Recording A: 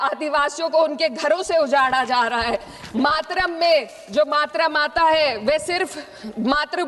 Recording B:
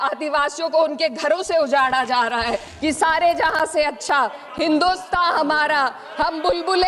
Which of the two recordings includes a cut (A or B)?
B